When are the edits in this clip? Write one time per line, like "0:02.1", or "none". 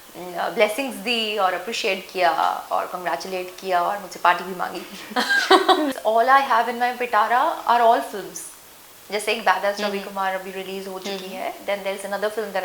0:05.9